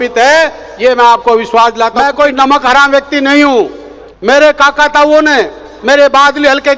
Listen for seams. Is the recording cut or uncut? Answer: cut